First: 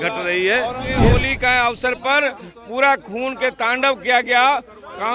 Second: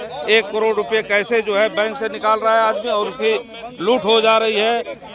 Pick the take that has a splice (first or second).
first